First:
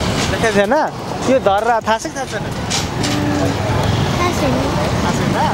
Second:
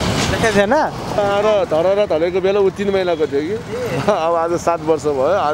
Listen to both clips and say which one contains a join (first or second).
second